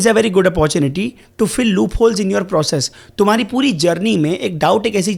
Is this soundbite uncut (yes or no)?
yes